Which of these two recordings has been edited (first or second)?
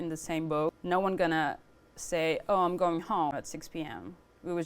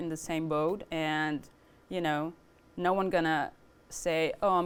first